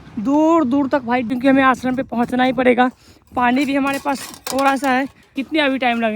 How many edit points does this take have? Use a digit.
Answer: 2